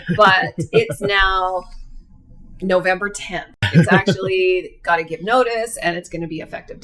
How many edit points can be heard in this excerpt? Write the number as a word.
one